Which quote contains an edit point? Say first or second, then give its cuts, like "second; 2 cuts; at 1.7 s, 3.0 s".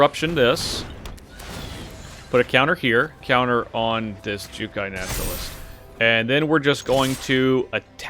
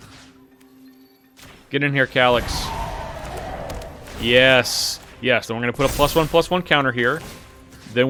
first; 1 cut; at 3.2 s